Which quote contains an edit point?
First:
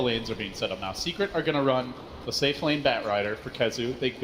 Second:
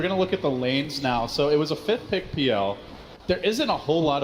second; 1 cut; at 1.4 s

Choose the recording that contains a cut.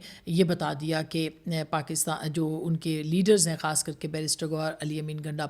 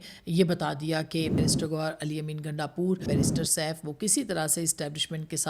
second; 2 cuts; at 1.4 s, 3.1 s

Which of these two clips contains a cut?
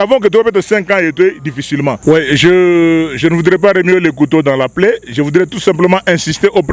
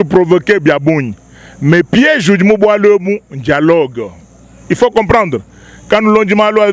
first; 1 cut; at 2.0 s

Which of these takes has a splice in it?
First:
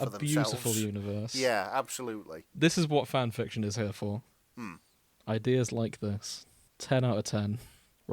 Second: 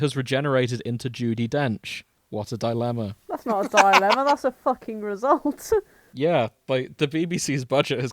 first; 1 cut; at 2.5 s

